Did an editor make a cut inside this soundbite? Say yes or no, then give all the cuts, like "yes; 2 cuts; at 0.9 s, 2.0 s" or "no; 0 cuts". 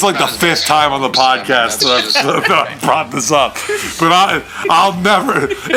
no; 0 cuts